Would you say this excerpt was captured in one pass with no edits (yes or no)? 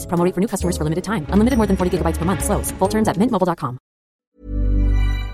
no